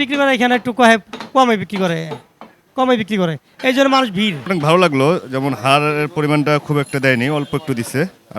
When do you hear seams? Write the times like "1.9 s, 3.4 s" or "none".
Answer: 4.5 s